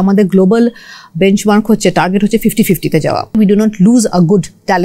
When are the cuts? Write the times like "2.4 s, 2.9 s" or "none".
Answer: 3.3 s